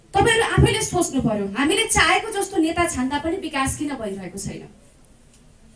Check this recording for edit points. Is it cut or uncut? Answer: uncut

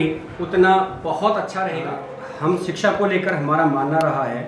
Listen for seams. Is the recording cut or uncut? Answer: cut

